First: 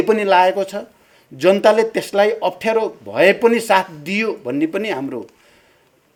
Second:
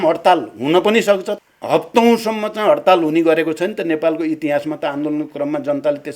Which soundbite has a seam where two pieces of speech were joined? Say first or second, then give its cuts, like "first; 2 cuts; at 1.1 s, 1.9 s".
second; 1 cut; at 1.3 s